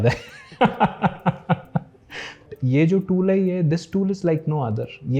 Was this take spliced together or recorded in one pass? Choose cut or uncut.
cut